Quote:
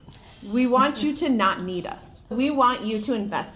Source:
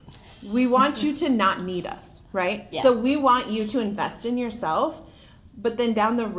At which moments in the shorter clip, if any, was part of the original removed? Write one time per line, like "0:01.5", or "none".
0:02.3